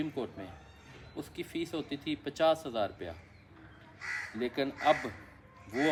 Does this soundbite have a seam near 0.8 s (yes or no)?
no